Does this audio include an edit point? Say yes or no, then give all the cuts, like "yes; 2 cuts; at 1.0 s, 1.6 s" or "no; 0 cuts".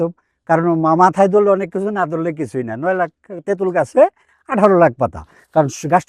no; 0 cuts